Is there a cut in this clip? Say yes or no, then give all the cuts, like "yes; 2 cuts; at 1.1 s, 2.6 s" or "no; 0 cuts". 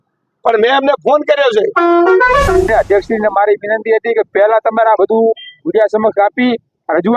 yes; 1 cut; at 2.7 s